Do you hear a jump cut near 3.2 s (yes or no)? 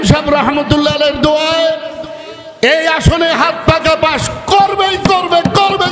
no